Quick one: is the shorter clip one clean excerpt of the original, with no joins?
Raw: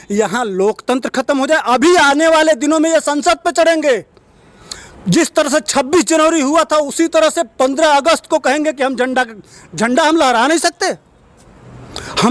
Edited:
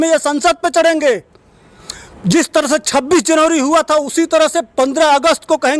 yes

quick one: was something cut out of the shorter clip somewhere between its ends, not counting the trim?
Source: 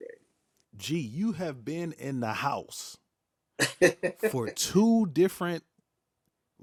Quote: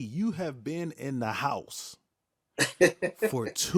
no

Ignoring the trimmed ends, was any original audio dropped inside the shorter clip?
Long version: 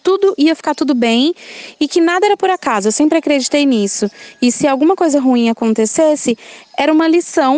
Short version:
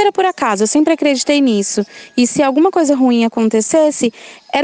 no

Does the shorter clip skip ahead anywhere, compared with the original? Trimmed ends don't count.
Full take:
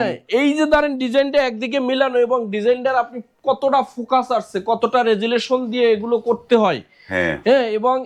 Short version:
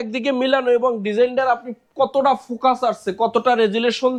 no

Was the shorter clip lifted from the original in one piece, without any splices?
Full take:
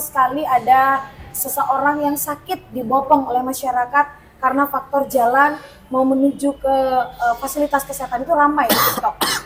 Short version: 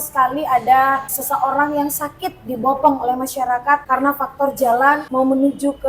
no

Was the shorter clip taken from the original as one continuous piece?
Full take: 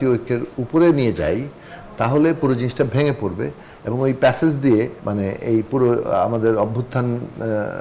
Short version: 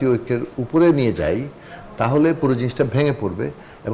yes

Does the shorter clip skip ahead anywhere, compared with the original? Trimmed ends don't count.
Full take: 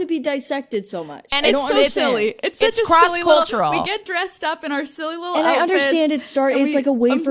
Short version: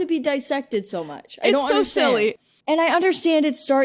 yes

